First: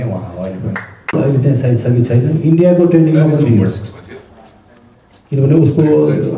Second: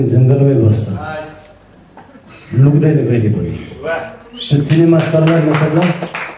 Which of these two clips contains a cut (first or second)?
first